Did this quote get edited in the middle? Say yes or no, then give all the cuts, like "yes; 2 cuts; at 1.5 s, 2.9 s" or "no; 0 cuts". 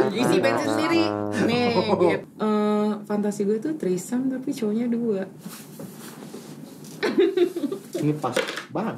yes; 1 cut; at 2.2 s